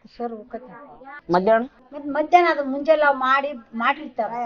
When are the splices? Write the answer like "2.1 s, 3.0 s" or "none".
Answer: none